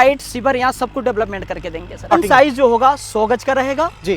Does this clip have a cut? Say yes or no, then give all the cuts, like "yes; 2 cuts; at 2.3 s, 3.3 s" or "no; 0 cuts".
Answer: yes; 1 cut; at 2.1 s